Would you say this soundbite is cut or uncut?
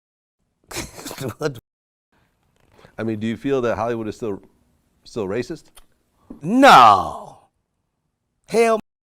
uncut